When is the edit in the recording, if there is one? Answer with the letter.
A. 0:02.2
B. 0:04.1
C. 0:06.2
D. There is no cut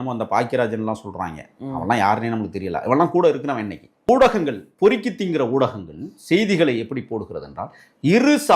B